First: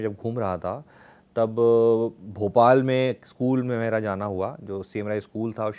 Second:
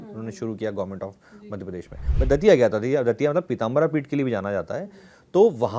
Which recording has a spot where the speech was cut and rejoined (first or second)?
second